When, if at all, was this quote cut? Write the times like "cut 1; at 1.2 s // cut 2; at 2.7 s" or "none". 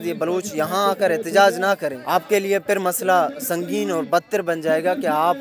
cut 1; at 2.0 s